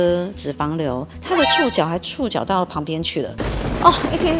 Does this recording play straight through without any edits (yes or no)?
yes